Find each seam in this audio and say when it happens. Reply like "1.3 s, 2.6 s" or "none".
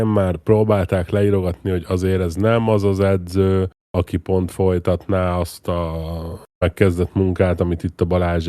3.8 s

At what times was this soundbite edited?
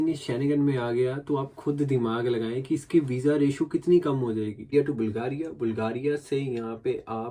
4.7 s

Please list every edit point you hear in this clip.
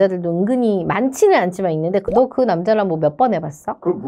none

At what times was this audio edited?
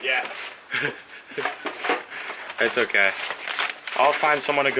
none

